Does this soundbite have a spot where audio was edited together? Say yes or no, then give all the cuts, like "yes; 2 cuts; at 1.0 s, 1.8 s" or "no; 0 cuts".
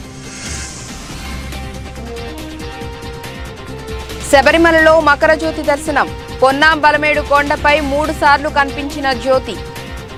no; 0 cuts